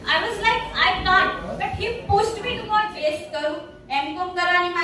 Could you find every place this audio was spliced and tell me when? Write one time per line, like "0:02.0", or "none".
0:02.9